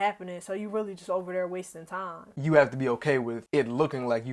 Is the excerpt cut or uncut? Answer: cut